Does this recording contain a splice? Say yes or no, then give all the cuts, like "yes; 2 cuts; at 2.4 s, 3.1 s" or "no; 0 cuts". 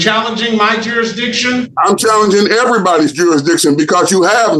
no; 0 cuts